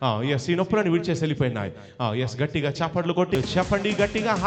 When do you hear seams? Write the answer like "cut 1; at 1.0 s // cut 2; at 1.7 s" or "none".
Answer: cut 1; at 3.4 s